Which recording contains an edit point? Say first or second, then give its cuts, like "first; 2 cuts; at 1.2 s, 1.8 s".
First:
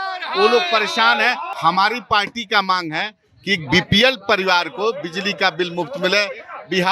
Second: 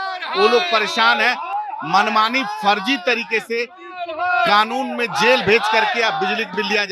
first; 1 cut; at 1.5 s